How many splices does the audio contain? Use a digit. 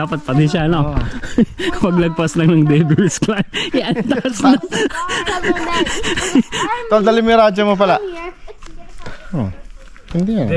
1